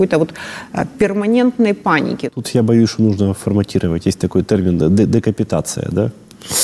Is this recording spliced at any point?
yes; 1 cut; at 2.3 s

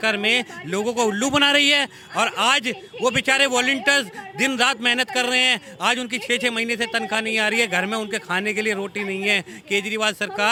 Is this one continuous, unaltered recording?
yes; 0 cuts

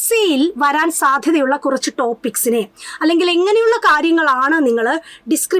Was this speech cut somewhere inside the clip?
no; 0 cuts

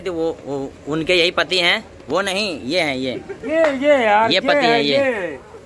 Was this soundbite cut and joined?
no; 0 cuts

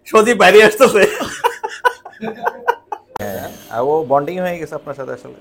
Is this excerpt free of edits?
no; 1 cut; at 3.2 s

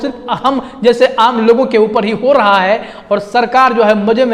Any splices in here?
no; 0 cuts

